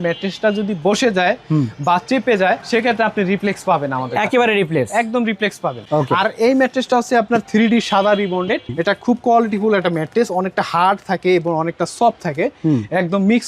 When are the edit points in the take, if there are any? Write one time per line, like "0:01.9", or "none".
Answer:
none